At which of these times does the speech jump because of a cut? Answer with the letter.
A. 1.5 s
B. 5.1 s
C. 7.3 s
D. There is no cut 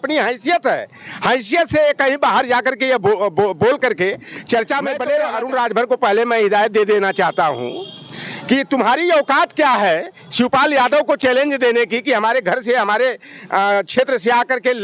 B